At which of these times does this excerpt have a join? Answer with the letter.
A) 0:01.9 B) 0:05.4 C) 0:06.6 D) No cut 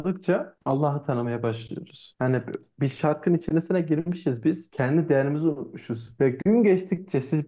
D